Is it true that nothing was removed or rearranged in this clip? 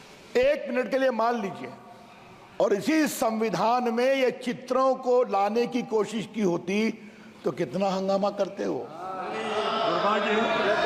yes; 0 cuts

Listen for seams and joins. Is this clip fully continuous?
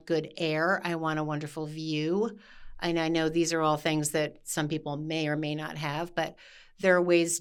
yes; 0 cuts

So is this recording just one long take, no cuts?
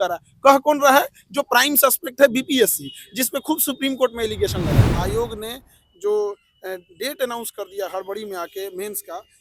no; 1 cut; at 4.9 s

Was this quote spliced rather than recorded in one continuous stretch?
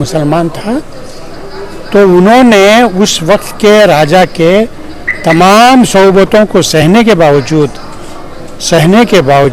no; 0 cuts

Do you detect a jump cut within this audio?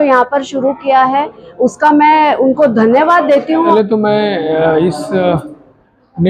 yes; 1 cut; at 3.7 s

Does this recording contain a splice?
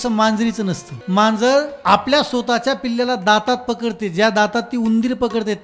yes; 2 cuts; at 0.9 s, 1.7 s

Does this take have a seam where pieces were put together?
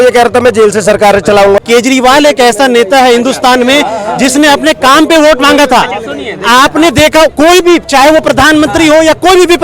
yes; 1 cut; at 1.6 s

